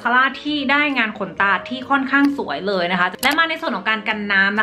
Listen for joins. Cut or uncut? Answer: cut